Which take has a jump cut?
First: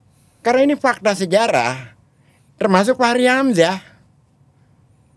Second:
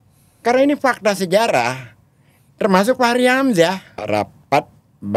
second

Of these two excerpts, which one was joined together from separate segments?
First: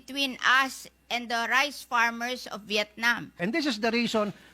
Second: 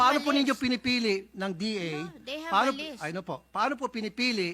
first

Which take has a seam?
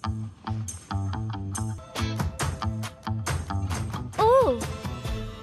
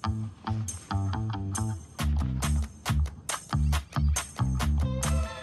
first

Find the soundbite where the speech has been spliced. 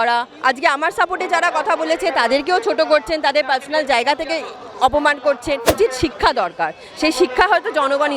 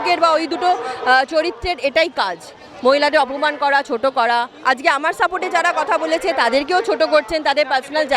first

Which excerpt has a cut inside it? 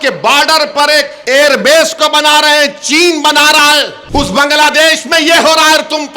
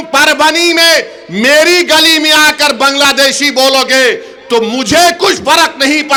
first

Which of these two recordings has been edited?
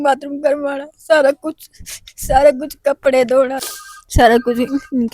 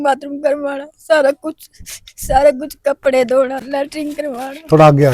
first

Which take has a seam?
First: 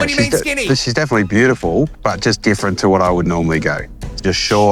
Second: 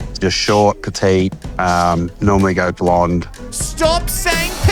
second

